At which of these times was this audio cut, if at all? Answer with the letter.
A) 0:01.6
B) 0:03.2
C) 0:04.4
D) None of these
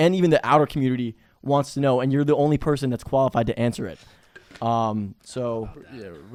D